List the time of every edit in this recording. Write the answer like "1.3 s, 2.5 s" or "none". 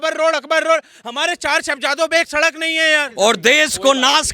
3.1 s